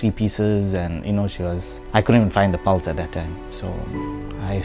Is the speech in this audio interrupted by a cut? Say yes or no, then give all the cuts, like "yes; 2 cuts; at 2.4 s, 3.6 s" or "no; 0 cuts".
yes; 1 cut; at 1.7 s